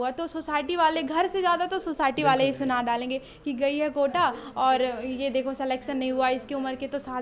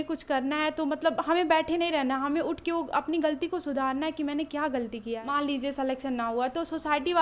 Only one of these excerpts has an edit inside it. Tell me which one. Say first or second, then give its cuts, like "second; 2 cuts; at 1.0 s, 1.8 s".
second; 1 cut; at 5.2 s